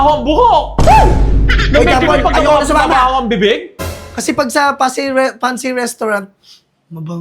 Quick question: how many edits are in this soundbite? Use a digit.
1